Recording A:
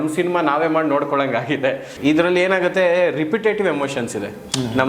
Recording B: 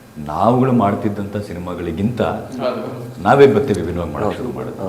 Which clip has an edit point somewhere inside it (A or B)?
A